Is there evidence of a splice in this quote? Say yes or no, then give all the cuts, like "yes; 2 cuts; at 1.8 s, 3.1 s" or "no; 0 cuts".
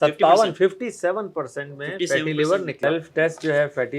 yes; 1 cut; at 2.7 s